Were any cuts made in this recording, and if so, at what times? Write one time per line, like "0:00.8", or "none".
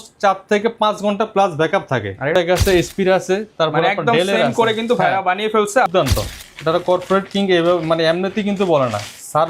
0:02.4
0:05.9